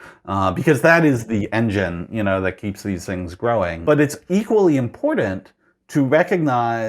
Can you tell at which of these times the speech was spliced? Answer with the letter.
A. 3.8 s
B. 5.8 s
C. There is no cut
A